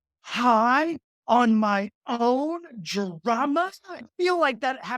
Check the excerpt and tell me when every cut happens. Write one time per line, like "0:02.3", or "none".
0:03.9